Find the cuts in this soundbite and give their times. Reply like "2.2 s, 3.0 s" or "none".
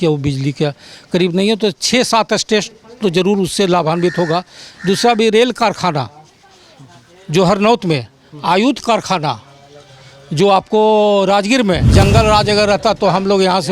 11.8 s